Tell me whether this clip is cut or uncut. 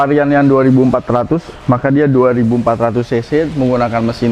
uncut